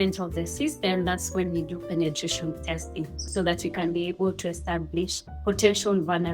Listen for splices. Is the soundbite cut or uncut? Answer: cut